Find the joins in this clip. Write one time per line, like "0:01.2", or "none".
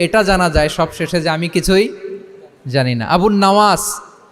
none